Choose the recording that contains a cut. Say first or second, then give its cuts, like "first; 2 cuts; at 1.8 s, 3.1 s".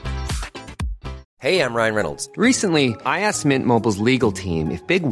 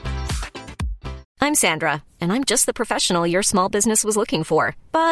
first; 1 cut; at 1.2 s